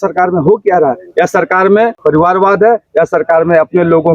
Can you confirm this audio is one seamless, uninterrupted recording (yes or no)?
no